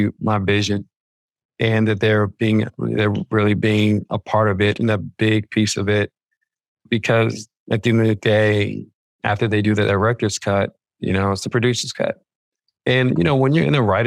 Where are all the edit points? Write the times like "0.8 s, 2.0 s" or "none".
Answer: none